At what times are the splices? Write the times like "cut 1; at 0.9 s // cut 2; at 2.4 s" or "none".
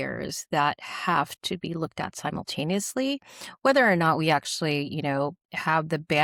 none